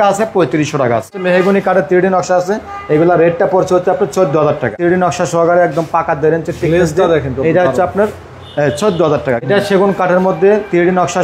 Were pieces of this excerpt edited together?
yes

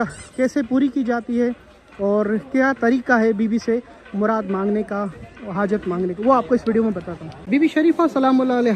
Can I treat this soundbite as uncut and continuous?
yes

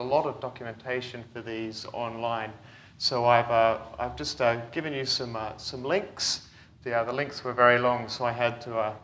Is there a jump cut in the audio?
no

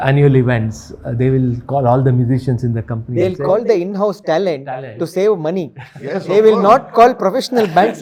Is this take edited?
no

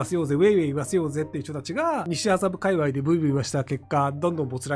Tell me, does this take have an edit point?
yes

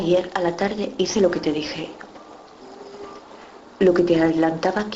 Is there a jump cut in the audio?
yes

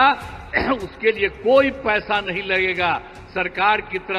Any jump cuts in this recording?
no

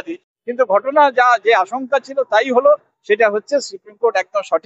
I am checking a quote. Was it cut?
no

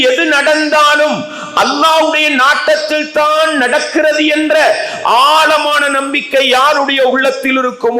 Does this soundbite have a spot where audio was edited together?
no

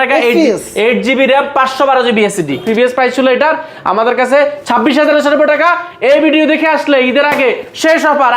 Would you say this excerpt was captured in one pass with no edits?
no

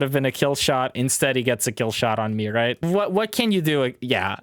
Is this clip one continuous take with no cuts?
no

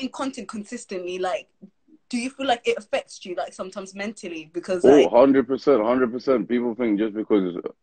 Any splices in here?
no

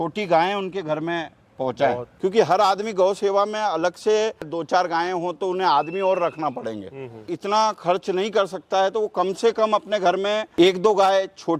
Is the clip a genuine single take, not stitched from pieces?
no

